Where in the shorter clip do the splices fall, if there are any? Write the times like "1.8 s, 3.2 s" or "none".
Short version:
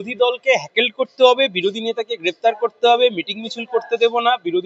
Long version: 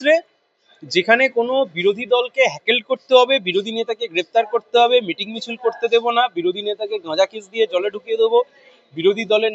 none

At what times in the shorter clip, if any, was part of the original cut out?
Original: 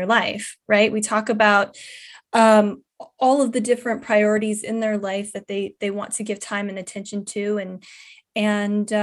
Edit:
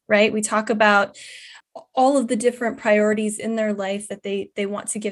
1.6 s

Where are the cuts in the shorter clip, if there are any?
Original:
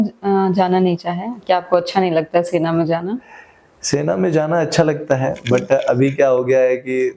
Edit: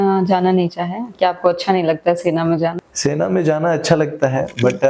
2.9 s

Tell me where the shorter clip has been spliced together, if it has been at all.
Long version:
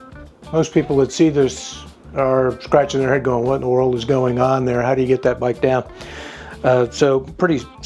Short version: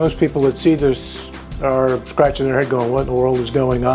none

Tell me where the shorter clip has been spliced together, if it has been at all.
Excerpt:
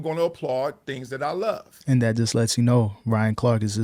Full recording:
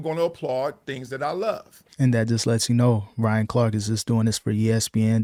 1.7 s

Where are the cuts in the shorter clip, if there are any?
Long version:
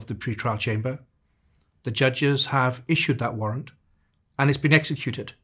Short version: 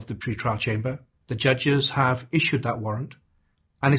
1.1 s

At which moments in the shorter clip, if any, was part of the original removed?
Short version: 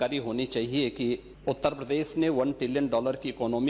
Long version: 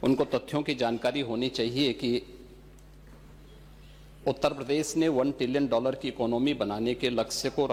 1.3 s

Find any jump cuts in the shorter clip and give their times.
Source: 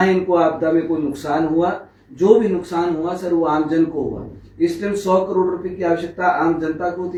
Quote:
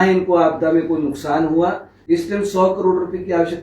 1.9 s

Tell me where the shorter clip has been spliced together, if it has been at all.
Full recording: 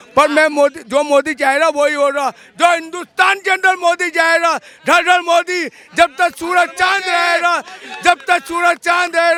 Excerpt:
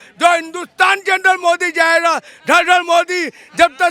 none

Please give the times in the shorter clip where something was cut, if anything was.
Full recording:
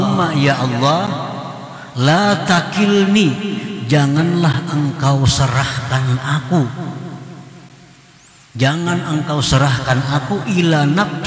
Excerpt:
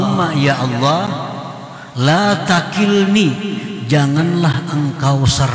none

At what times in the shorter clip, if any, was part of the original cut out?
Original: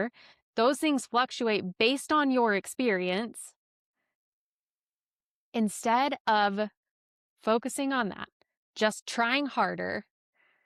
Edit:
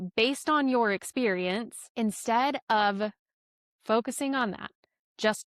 1.8 s

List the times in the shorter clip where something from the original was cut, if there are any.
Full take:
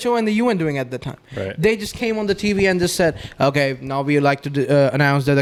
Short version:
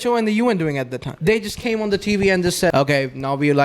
1.1 s, 2.7 s

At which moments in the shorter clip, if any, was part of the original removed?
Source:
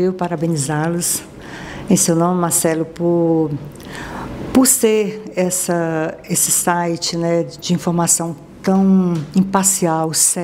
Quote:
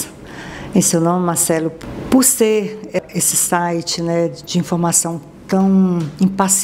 1.8 s, 3.0 s

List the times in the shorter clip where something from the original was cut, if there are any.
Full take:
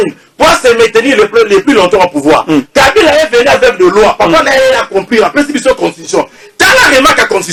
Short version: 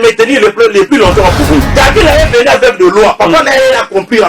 1.5 s

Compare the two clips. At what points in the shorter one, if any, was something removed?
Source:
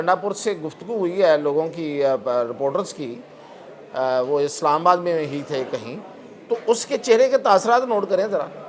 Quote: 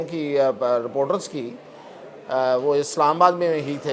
none

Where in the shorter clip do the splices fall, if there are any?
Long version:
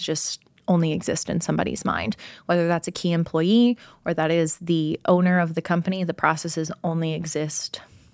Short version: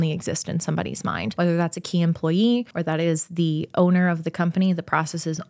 1.3 s, 2.7 s

